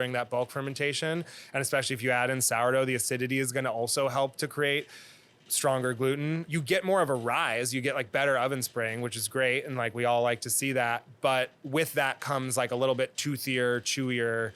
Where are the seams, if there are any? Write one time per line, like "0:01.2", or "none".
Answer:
0:06.4